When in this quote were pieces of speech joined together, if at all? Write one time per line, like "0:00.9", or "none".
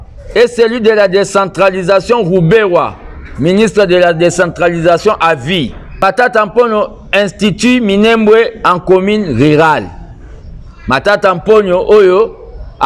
0:05.9